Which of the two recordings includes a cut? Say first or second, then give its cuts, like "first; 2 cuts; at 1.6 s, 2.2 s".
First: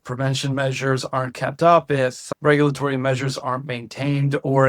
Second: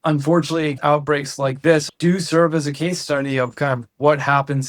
second; 2 cuts; at 0.8 s, 1.8 s